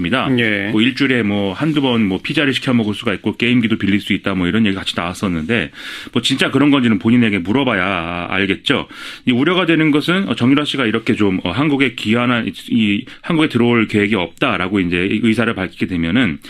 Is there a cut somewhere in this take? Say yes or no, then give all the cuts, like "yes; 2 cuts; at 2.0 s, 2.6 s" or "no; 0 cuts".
yes; 1 cut; at 12.7 s